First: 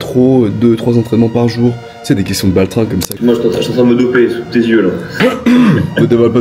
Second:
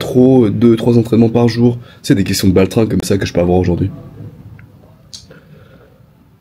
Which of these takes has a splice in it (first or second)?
first